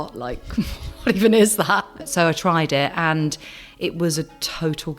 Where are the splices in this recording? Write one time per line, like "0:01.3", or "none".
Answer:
0:02.0

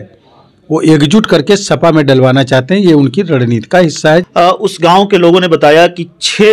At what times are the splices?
0:04.3

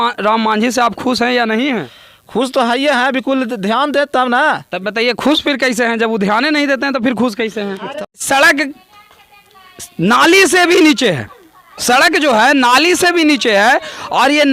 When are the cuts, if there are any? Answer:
0:08.2

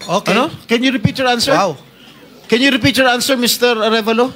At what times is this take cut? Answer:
none

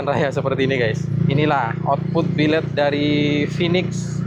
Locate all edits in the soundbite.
0:01.1

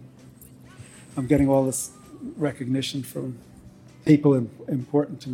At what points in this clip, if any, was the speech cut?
0:04.1

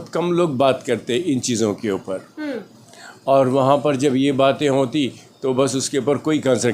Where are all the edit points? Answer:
none

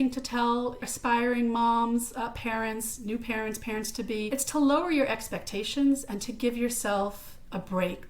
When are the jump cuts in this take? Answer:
0:00.9
0:04.3

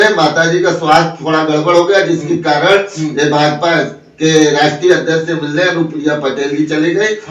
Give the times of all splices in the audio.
none

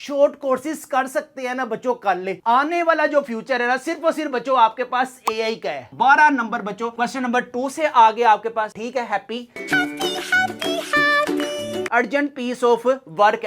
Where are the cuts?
0:05.8
0:11.9

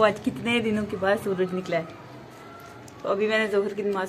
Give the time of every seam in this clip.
none

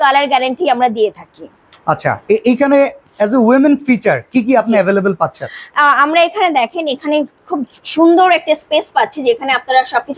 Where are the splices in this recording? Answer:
none

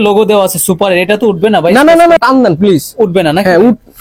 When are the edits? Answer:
0:02.2

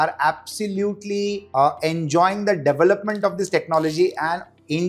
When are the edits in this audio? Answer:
0:01.4

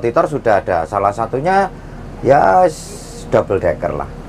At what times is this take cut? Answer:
none

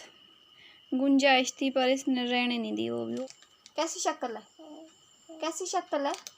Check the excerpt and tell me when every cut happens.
0:03.2

